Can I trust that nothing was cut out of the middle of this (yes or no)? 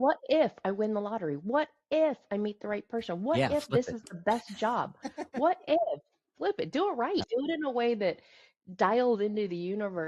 no